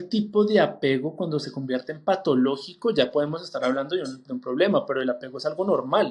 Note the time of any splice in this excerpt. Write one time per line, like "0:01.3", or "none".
none

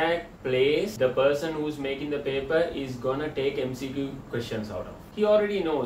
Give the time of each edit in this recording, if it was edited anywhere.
0:00.9
0:05.0

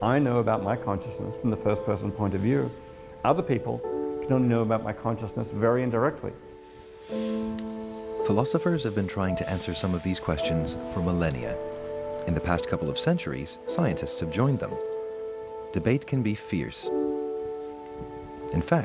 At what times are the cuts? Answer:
0:09.7

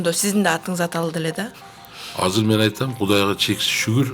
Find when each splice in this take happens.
0:01.6

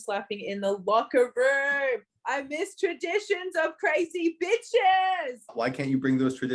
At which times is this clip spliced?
0:05.5

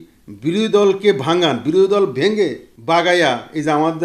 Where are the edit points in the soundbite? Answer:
0:02.7

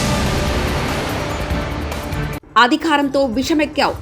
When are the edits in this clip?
0:02.3

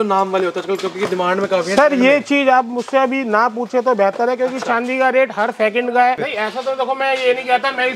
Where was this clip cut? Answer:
0:06.2

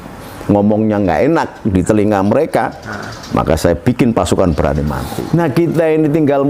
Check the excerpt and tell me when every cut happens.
0:05.1

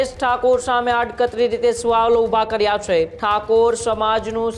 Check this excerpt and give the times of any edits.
0:03.2

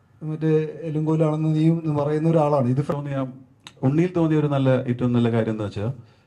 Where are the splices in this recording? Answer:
0:02.9

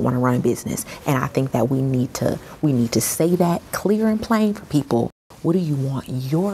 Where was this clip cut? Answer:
0:05.2

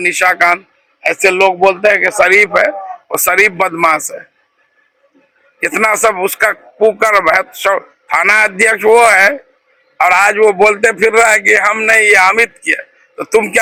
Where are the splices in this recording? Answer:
none

